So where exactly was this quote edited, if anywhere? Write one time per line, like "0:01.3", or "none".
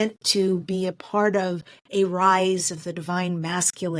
none